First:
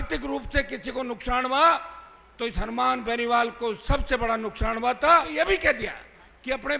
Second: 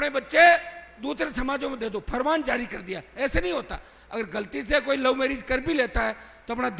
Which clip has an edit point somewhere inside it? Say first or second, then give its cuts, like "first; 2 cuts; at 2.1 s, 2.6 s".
first; 1 cut; at 5.3 s